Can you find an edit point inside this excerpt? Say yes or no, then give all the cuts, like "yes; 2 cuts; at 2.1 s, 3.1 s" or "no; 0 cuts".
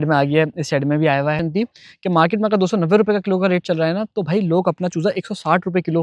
yes; 1 cut; at 1.4 s